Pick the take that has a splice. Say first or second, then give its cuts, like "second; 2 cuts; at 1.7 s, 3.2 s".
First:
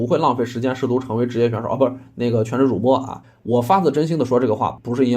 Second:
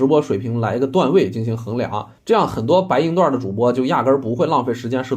first; 1 cut; at 3.2 s